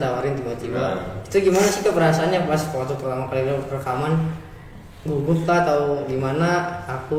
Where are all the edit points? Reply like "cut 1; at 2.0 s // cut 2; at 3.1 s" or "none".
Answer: none